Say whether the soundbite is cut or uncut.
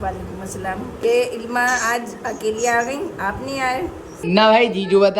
cut